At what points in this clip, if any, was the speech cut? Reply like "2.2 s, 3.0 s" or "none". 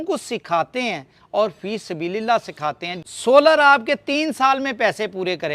2.9 s